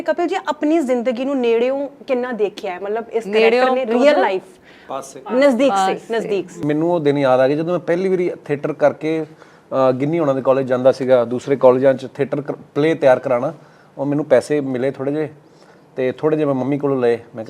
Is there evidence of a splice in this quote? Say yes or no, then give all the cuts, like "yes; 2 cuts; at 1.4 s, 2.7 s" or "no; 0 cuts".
yes; 1 cut; at 6.5 s